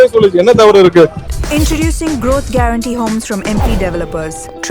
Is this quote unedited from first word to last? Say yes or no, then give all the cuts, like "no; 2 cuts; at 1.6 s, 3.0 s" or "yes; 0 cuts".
no; 1 cut; at 1.3 s